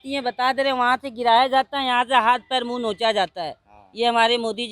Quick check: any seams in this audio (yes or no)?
no